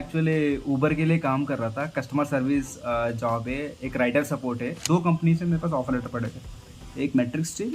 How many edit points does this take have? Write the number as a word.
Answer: one